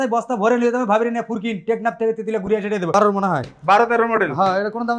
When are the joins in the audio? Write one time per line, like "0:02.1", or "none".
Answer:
0:02.9